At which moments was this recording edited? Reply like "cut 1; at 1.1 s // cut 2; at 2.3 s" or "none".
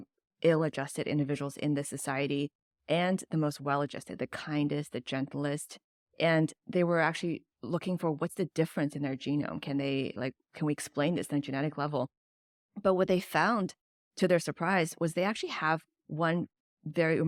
none